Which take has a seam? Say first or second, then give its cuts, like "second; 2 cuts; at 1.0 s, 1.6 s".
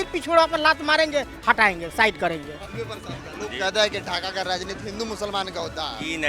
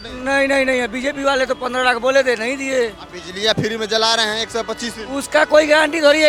first; 1 cut; at 2.6 s